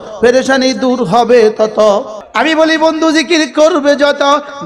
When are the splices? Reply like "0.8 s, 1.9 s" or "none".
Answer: 2.2 s